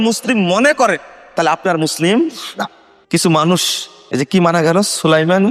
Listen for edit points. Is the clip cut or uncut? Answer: uncut